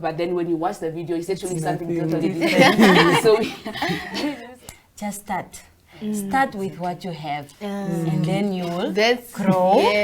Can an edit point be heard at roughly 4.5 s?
yes; 1 cut; at 4.5 s

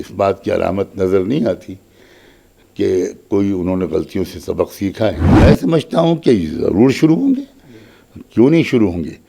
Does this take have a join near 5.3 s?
yes; 1 cut; at 5.3 s

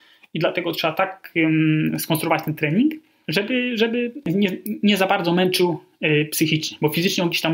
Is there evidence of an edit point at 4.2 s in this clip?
yes; 3 cuts; at 1.2 s, 3.1 s, 4.2 s

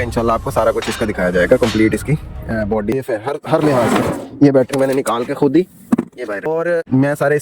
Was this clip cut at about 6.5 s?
yes; 2 cuts; at 2.9 s, 6.5 s

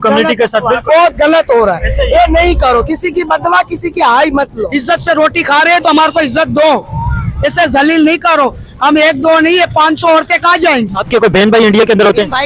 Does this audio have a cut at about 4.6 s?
yes; 2 cuts; at 4.6 s, 11.0 s

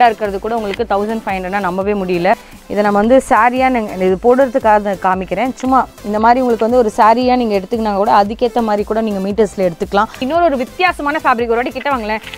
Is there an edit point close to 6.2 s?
no; 2 cuts; at 2.5 s, 10.2 s

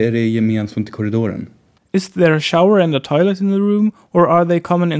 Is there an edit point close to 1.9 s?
no; 0 cuts

